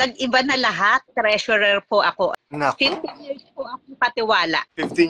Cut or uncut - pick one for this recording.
cut